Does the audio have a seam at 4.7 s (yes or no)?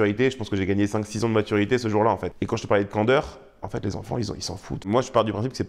yes